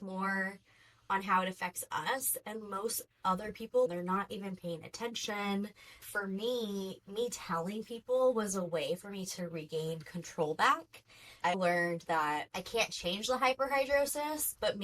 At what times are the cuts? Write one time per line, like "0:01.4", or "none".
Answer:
0:03.9
0:06.0
0:11.5